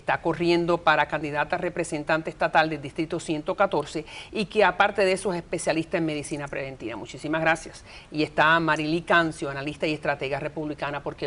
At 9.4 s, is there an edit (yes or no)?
yes